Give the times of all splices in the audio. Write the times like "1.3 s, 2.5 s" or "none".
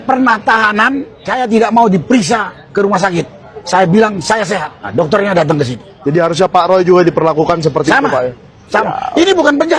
1.2 s, 2.6 s, 4.8 s, 5.9 s

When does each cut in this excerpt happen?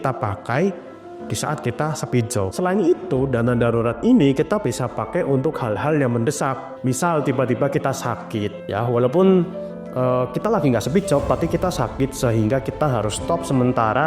8.6 s

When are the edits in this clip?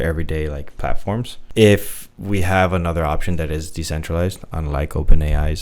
1.4 s

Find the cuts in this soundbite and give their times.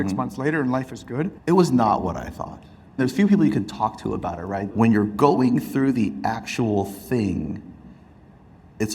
1.4 s, 3.0 s, 4.7 s

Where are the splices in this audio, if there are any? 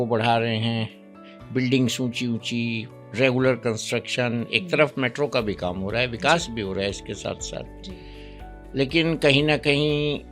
none

